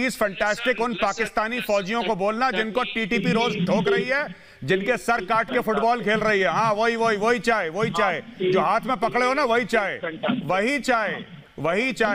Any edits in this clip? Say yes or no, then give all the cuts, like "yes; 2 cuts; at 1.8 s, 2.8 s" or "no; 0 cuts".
no; 0 cuts